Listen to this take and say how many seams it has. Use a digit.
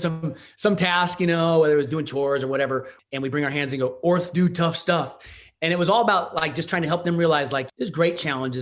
2